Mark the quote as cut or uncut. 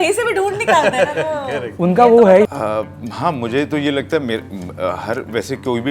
cut